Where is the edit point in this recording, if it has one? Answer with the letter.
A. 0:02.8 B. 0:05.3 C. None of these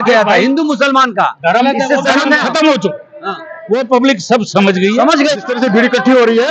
B